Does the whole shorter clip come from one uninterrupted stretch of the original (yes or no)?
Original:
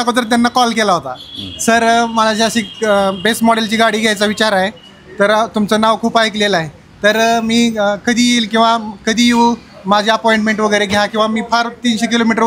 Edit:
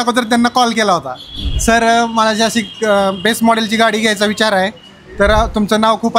yes